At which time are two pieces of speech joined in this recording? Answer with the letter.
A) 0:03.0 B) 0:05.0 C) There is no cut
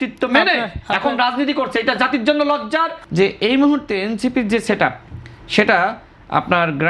A